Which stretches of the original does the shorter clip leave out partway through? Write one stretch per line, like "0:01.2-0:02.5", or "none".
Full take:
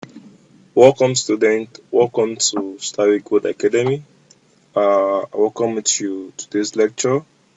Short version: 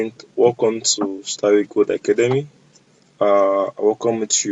none